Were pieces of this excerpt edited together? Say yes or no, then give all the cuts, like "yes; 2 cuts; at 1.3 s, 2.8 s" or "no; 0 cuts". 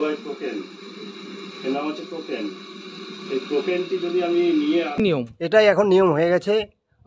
yes; 1 cut; at 5.4 s